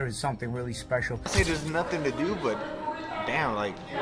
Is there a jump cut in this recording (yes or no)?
yes